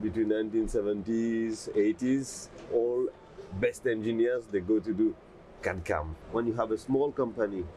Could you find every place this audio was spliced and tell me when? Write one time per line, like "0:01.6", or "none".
0:06.2